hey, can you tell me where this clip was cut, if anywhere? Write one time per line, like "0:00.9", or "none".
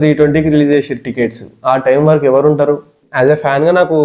0:03.0